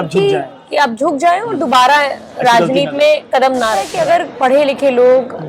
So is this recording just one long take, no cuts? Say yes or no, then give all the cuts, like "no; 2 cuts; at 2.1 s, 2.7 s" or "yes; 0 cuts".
no; 1 cut; at 3.9 s